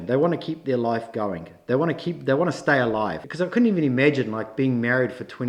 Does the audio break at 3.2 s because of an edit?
yes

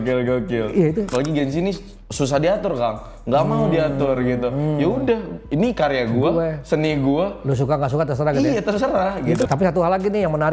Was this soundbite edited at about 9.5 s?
yes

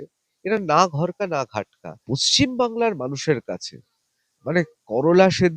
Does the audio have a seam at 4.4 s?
no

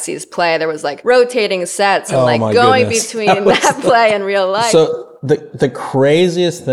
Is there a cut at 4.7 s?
yes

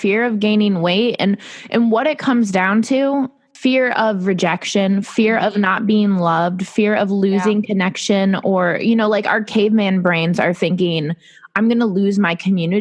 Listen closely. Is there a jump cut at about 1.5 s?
no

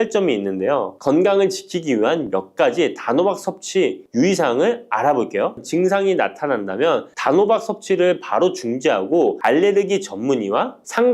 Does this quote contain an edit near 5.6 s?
yes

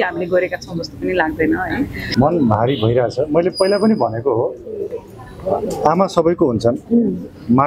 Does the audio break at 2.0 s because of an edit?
yes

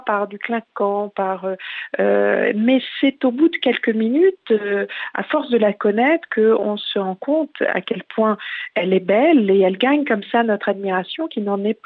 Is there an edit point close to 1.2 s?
no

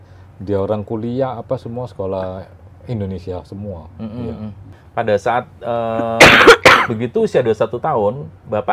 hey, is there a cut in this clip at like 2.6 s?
no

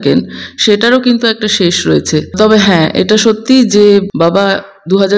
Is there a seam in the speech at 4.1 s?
yes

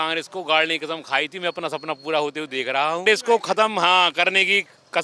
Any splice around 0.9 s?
no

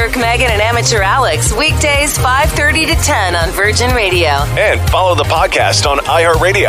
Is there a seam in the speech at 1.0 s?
no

